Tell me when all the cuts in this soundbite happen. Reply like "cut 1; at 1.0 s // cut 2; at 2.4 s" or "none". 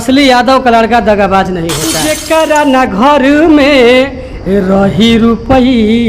cut 1; at 2.1 s